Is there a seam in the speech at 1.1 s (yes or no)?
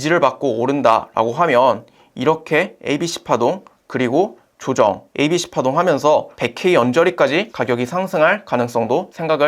no